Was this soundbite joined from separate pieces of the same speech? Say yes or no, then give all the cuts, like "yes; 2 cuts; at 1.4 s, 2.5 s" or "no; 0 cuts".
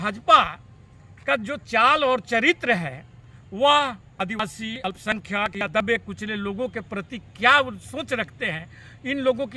no; 0 cuts